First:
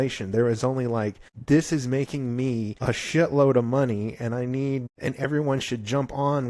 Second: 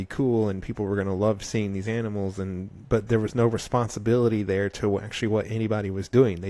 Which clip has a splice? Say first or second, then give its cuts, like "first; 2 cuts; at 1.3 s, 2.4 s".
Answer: first; 3 cuts; at 1.3 s, 2.7 s, 4.9 s